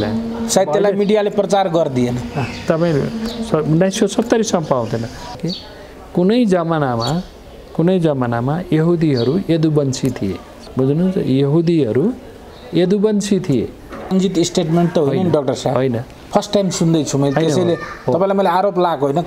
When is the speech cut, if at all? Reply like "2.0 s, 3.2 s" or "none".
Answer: 5.3 s, 10.6 s, 14.1 s